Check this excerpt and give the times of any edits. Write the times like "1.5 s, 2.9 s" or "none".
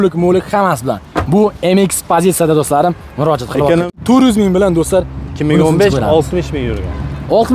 4.0 s